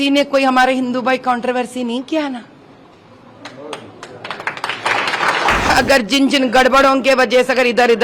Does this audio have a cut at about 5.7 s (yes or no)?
yes